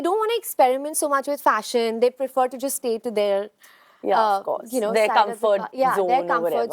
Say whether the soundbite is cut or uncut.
uncut